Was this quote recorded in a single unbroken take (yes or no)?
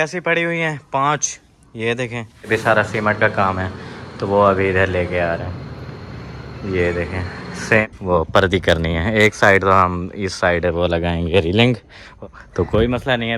no